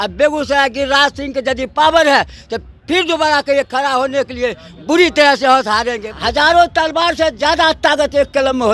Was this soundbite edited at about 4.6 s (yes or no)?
no